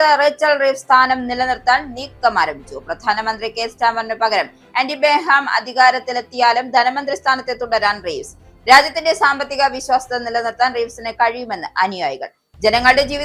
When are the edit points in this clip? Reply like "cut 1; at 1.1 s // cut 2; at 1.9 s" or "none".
none